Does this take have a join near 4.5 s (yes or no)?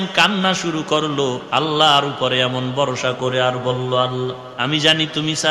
yes